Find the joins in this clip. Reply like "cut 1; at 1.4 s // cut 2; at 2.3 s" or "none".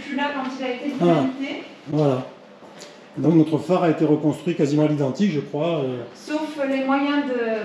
none